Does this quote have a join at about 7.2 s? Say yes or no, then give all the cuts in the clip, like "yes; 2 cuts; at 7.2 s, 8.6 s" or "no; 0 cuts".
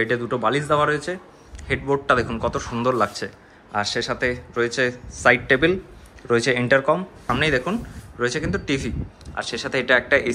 yes; 1 cut; at 7.2 s